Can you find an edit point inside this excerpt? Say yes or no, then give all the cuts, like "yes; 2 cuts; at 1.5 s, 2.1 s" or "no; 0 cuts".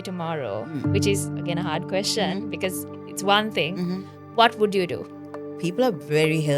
yes; 1 cut; at 5.5 s